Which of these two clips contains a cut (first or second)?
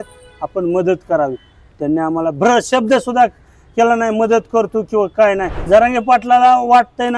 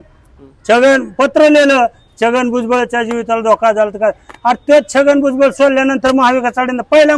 first